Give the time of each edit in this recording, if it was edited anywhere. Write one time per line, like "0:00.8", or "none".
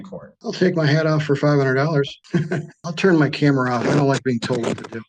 0:02.7